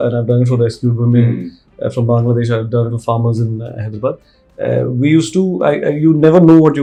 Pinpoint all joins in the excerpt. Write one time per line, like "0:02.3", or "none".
none